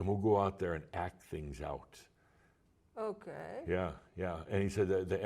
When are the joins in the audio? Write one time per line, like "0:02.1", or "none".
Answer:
none